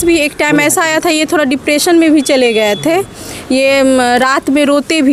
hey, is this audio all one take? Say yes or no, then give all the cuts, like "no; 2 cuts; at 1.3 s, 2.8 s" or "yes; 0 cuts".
yes; 0 cuts